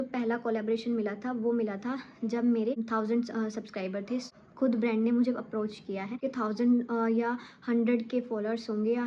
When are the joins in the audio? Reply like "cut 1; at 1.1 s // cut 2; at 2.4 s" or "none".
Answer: cut 1; at 2.9 s // cut 2; at 4.2 s // cut 3; at 6.2 s